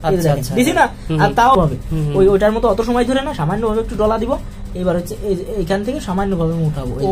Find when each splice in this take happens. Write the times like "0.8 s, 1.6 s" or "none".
1.5 s